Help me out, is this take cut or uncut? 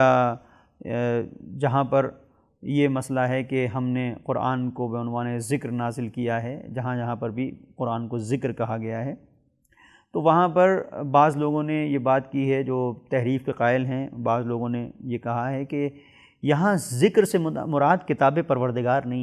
uncut